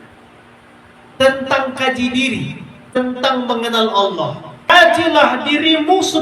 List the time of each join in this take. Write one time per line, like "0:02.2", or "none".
0:03.0
0:04.7